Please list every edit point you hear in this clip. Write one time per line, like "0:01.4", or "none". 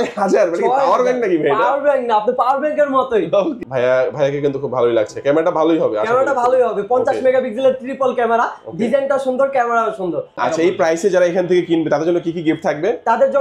0:03.5
0:10.4